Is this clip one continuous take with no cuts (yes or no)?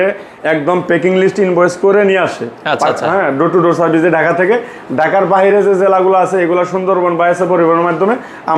yes